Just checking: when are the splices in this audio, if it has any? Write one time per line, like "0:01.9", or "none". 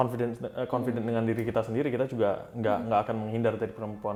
none